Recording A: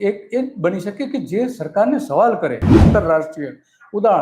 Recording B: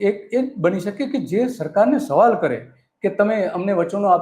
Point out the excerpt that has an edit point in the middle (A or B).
A